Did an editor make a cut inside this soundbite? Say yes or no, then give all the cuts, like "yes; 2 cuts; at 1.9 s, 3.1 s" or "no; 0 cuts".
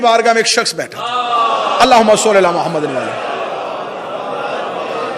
no; 0 cuts